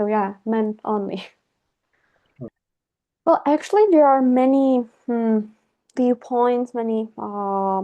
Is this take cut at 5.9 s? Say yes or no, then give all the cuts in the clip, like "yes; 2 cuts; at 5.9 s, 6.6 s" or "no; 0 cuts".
no; 1 cut; at 2.5 s